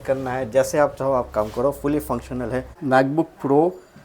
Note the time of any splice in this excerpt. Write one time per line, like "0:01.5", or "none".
0:02.8